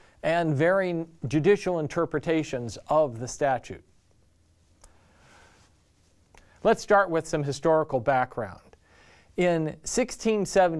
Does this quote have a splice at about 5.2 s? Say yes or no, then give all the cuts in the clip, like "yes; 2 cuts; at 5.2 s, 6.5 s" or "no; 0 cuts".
yes; 1 cut; at 5.2 s